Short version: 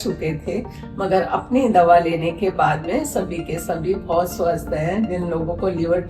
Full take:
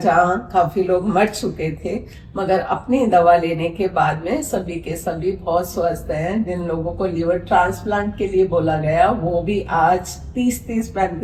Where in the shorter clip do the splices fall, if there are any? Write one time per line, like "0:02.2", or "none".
none